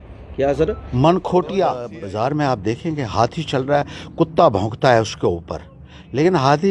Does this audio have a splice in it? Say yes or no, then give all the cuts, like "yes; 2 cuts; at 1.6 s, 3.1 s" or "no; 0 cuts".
yes; 1 cut; at 2.0 s